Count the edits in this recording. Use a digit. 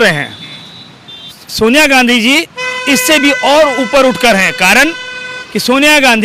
1